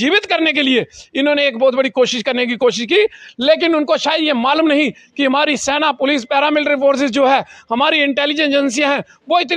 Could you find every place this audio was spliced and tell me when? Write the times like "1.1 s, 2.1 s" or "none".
none